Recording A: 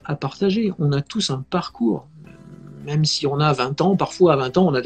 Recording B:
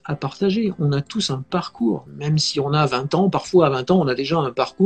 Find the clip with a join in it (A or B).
B